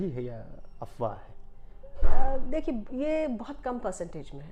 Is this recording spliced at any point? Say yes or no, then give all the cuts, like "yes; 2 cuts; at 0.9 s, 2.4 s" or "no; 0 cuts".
no; 0 cuts